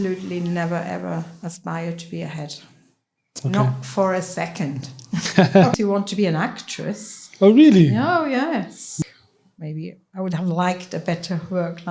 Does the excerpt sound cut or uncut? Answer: cut